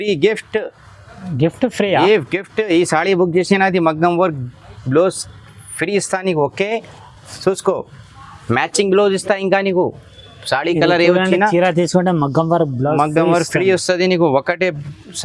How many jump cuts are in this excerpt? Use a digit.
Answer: 0